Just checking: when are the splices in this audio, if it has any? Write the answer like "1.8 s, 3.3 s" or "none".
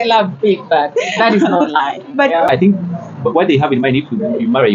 2.5 s